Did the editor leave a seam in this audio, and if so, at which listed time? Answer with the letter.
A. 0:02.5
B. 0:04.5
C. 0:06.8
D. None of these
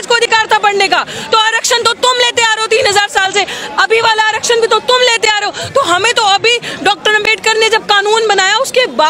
D